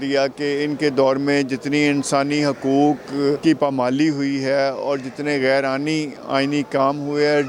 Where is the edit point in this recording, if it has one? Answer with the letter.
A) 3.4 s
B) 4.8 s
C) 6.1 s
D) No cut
A